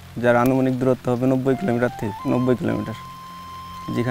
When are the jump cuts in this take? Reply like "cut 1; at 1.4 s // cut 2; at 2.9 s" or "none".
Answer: none